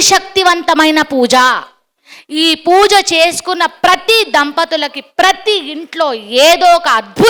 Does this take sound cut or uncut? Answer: uncut